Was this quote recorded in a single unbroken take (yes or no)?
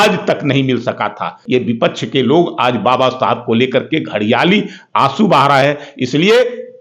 no